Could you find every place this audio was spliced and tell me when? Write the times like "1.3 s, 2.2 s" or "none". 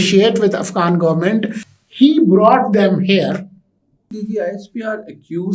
1.6 s, 4.2 s